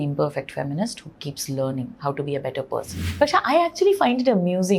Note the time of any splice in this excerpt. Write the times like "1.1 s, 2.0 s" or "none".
3.0 s